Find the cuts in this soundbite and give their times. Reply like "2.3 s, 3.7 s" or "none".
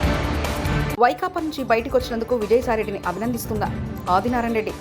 0.9 s